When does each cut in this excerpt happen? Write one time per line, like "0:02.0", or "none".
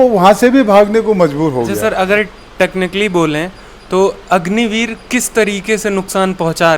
0:01.7